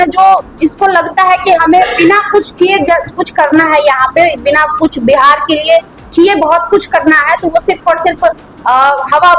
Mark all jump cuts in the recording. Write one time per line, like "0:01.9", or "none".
none